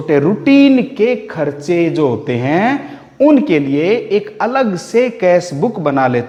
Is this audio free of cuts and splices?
yes; 0 cuts

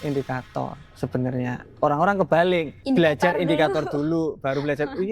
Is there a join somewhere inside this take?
yes; 1 cut; at 2.7 s

